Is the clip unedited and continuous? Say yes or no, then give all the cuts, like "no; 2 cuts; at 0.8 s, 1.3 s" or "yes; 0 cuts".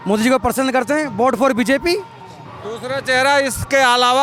yes; 0 cuts